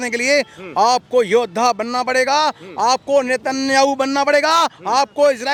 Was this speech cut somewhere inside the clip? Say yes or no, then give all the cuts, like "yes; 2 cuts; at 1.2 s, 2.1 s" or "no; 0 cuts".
no; 0 cuts